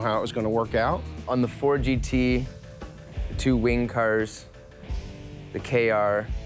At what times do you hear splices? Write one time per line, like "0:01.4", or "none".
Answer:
0:01.1